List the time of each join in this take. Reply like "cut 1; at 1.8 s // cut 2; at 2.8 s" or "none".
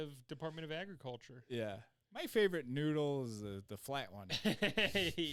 none